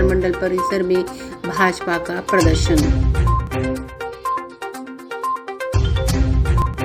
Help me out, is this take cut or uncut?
uncut